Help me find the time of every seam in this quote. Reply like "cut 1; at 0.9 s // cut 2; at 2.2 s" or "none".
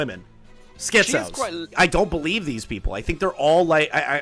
cut 1; at 1.7 s

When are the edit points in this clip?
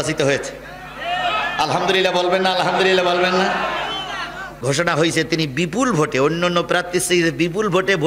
none

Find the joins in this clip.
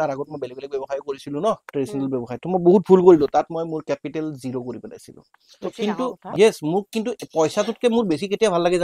cut 1; at 5.5 s

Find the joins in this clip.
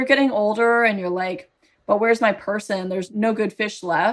cut 1; at 3.1 s

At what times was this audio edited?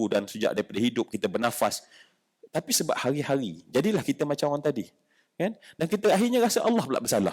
none

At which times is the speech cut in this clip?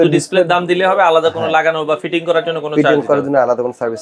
none

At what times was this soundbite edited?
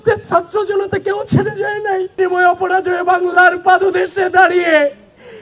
cut 1; at 2.2 s

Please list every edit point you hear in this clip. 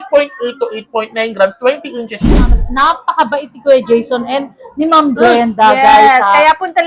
cut 1; at 2.3 s

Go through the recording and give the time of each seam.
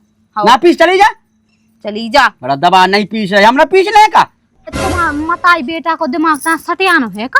cut 1; at 4.7 s

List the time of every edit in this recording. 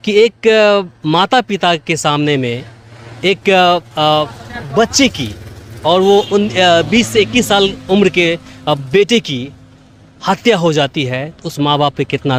none

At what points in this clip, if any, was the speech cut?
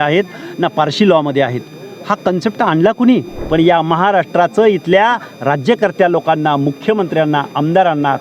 cut 1; at 3.4 s

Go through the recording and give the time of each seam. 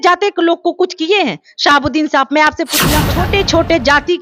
cut 1; at 3.0 s

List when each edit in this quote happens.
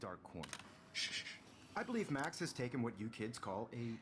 cut 1; at 1.0 s

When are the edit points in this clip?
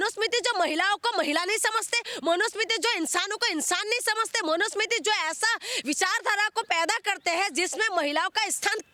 none

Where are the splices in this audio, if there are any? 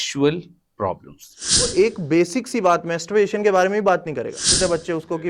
cut 1; at 1.7 s // cut 2; at 4.5 s

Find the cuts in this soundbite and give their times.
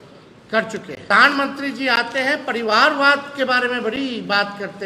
cut 1; at 1.1 s

